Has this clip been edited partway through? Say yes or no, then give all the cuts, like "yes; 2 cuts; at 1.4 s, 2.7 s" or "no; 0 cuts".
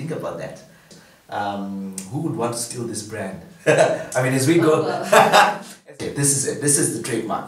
yes; 2 cuts; at 0.9 s, 5.8 s